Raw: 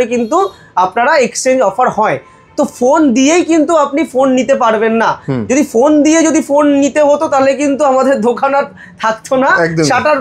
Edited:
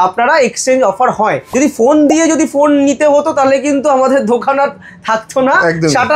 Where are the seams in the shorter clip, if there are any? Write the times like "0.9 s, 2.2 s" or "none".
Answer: 1.5 s